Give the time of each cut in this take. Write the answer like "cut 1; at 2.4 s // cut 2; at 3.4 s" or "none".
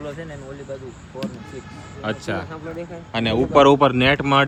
none